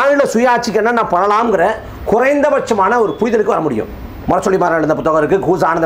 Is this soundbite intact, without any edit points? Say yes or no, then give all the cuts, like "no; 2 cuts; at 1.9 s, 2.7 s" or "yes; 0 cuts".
yes; 0 cuts